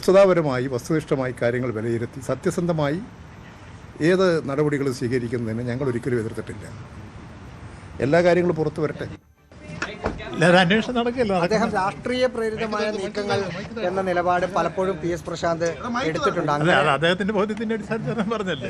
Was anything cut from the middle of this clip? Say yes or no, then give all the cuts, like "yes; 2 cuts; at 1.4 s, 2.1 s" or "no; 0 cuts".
yes; 1 cut; at 9.7 s